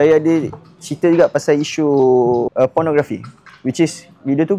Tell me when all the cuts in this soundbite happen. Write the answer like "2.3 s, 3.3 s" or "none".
2.5 s